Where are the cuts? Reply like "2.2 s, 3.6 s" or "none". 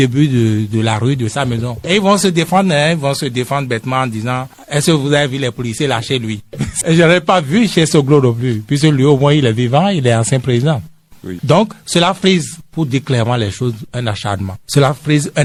none